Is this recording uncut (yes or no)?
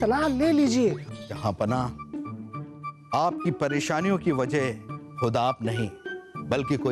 no